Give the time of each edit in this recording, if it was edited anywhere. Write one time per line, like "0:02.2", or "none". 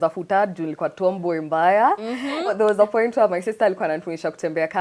0:02.5